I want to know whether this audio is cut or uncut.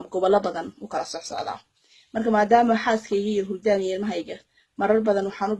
cut